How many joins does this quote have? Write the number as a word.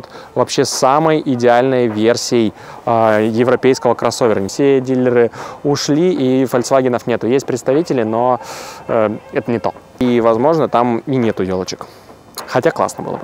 two